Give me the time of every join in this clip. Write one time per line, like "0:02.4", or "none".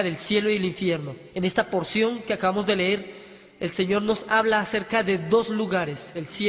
0:02.2